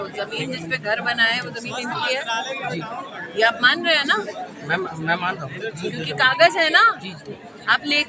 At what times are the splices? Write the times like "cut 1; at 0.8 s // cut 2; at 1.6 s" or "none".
none